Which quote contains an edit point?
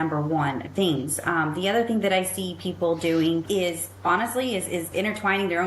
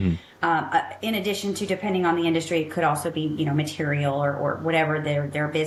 first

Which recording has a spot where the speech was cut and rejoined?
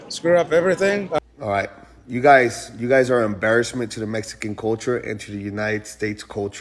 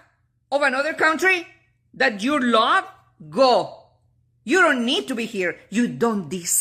first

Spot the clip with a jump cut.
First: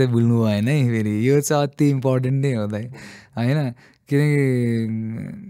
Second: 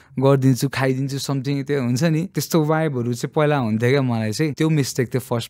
second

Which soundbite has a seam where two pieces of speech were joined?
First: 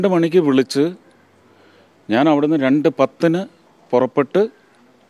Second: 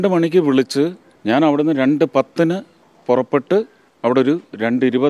second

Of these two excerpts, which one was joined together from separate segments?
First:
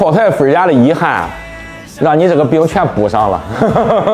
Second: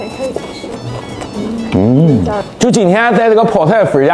second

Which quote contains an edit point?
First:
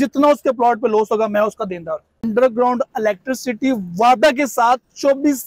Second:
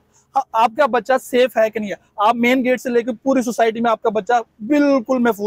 first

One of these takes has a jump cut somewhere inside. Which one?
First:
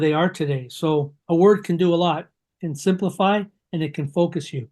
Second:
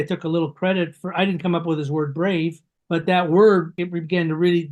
second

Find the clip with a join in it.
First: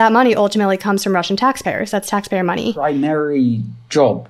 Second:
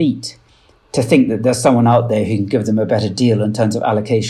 first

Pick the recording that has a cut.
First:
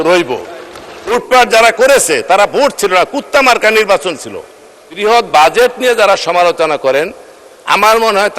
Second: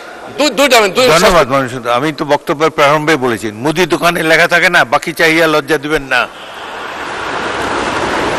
first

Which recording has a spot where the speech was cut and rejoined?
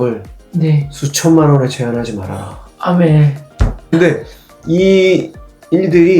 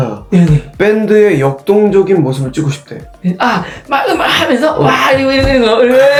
first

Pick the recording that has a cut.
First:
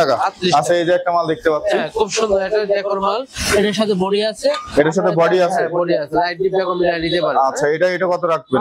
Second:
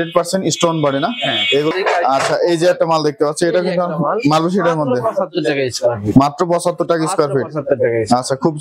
second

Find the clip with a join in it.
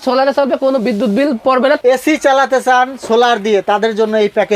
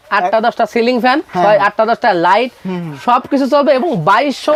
first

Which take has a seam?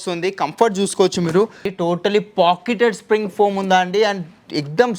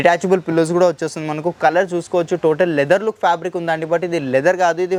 first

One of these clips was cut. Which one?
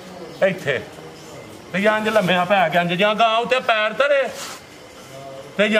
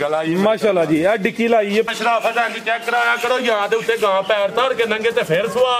second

